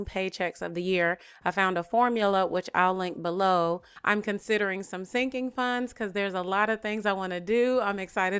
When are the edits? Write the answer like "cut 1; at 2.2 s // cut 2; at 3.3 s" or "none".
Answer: cut 1; at 3.9 s